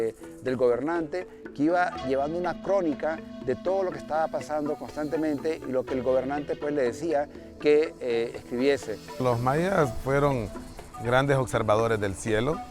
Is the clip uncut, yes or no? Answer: no